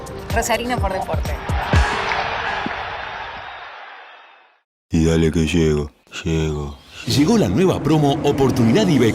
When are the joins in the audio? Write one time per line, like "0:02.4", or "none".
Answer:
0:04.9